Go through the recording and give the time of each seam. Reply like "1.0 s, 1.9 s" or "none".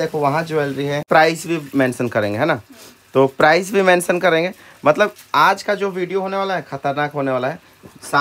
1.0 s